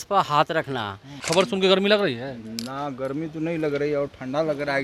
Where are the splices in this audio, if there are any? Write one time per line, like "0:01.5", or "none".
0:01.2